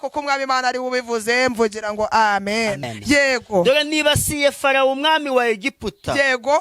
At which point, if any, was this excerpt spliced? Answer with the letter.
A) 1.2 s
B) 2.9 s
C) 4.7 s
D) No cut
B